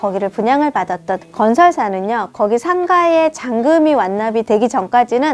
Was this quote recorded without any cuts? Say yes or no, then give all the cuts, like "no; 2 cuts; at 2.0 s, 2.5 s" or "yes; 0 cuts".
no; 2 cuts; at 1.2 s, 4.4 s